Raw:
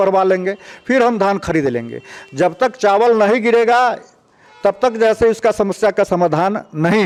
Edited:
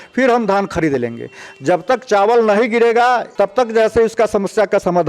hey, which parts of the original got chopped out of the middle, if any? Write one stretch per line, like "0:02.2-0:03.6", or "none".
0:04.0-0:04.5